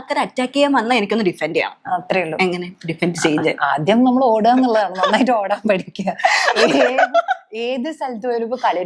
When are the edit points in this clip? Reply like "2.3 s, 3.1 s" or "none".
none